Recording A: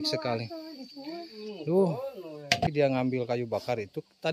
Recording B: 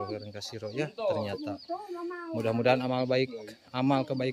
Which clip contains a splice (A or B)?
A